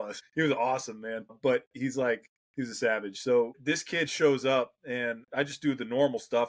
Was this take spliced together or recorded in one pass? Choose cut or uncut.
uncut